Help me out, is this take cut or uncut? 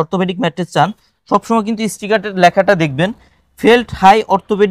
uncut